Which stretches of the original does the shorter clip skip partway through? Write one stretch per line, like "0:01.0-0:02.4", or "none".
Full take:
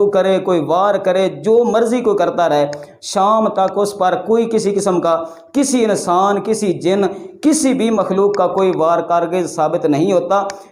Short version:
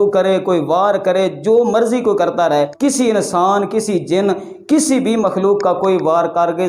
0:02.7-0:05.5